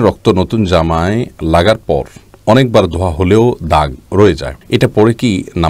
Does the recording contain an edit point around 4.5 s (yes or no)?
yes